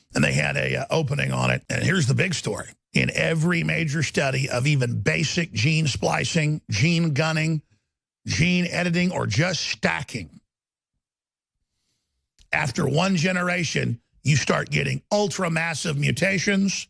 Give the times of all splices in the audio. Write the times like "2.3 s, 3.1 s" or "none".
1.7 s